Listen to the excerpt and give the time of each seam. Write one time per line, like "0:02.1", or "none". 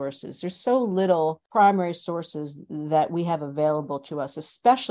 0:01.4